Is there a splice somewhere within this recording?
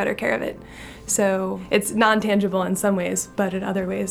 yes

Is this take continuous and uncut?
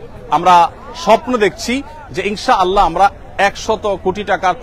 yes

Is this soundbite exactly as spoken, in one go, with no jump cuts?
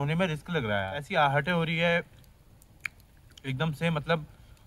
no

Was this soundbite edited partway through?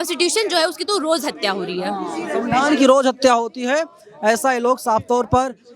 no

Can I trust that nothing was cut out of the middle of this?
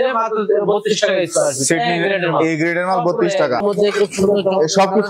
no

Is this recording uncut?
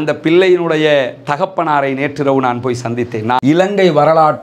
no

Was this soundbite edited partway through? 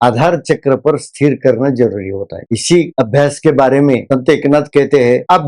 no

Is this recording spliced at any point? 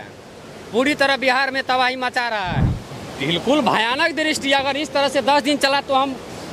yes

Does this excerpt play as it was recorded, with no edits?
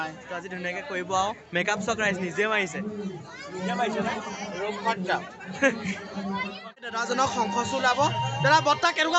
no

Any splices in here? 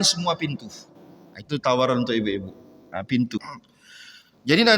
yes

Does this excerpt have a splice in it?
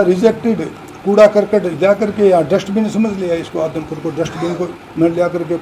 no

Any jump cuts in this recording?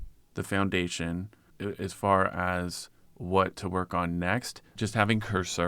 yes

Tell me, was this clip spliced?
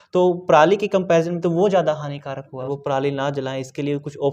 yes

